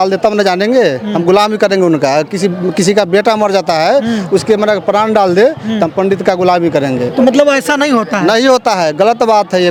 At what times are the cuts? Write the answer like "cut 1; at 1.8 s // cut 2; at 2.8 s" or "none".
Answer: none